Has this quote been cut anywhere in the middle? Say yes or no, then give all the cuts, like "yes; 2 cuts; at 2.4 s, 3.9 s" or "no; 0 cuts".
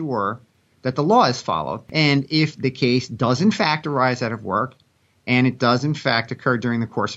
yes; 1 cut; at 1.8 s